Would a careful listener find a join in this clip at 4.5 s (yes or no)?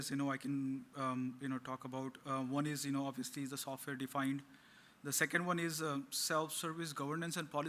yes